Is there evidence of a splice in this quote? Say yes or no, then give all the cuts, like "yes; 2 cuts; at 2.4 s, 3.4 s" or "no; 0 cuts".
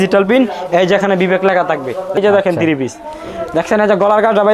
yes; 1 cut; at 2.2 s